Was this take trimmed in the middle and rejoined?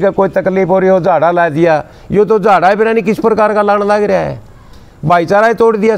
no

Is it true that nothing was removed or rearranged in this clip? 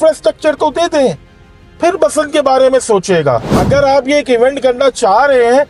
yes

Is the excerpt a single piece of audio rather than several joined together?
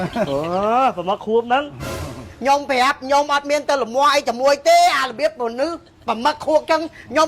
no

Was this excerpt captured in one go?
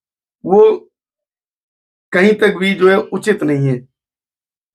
yes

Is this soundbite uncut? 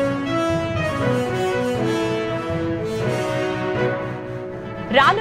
yes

